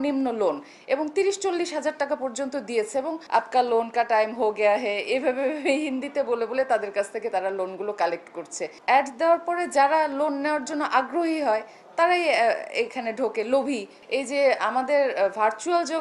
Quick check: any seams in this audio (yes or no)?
yes